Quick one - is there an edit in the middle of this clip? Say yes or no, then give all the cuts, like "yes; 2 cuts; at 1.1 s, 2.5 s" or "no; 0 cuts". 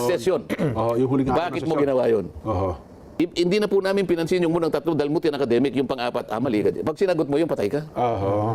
yes; 1 cut; at 3.0 s